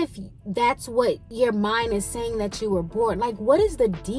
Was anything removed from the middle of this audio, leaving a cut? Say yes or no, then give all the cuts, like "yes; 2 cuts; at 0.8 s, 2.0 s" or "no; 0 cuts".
yes; 1 cut; at 1.2 s